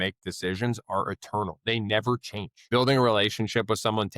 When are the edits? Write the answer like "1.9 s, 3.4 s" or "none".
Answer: 2.7 s